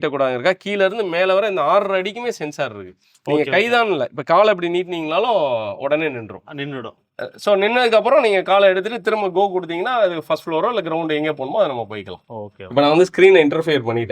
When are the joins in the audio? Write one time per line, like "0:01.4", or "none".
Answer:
none